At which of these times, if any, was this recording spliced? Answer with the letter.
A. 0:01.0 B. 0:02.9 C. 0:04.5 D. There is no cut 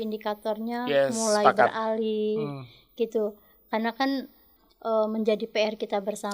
C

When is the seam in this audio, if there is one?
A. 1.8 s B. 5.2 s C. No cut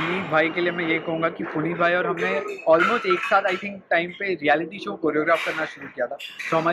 C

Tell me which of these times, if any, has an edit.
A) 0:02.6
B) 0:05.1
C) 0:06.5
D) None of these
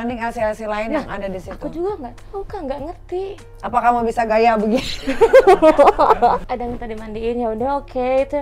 C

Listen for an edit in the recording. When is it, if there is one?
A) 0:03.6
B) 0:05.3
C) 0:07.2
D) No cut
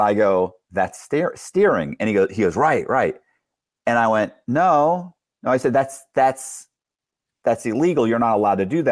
D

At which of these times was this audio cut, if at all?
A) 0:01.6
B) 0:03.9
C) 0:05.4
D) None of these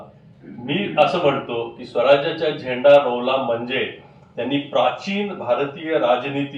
D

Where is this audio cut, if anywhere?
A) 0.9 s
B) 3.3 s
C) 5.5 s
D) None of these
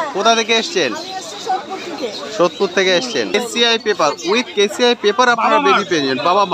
B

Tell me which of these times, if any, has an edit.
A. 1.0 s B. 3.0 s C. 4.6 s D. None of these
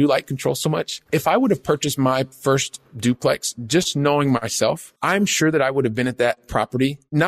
A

